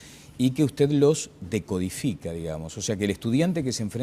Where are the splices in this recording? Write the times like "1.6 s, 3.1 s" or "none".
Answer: 1.3 s